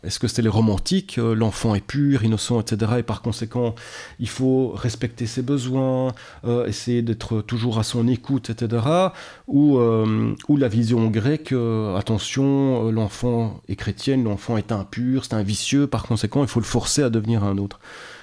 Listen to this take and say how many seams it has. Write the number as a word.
zero